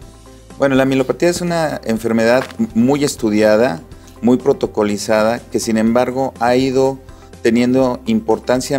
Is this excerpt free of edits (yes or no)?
no